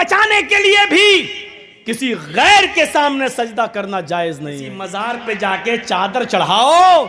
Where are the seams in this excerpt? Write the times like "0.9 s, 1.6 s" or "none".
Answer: 4.8 s